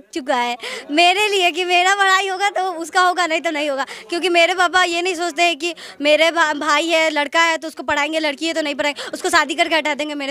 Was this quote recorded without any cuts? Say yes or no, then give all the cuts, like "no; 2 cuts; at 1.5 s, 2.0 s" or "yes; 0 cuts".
yes; 0 cuts